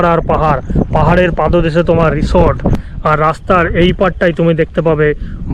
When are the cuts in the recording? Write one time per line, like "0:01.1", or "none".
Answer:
0:02.9